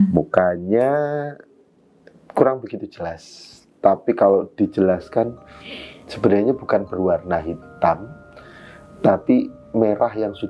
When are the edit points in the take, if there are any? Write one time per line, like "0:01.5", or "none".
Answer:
none